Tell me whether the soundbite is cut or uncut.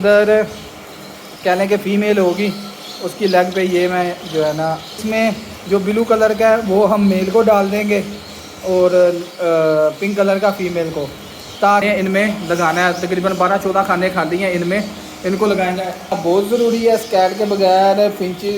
cut